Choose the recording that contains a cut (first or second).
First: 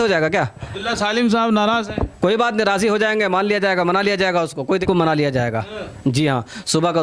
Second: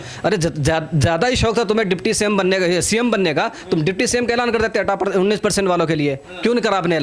first